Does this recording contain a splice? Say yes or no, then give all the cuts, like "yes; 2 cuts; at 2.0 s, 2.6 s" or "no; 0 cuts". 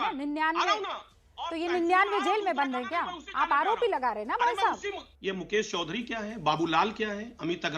yes; 1 cut; at 5.1 s